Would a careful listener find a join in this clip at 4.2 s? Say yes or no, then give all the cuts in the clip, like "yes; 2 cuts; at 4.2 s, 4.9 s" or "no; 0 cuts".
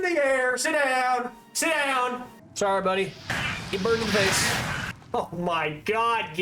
no; 1 cut; at 2.4 s